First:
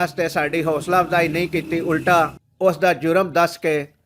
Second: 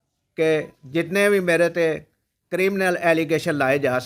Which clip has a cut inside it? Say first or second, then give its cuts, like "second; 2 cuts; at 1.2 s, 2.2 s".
first; 1 cut; at 2.4 s